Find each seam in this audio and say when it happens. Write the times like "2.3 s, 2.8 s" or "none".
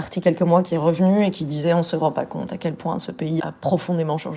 3.4 s